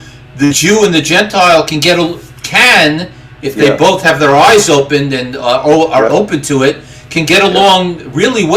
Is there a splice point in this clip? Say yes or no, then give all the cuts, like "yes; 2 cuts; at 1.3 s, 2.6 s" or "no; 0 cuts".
no; 0 cuts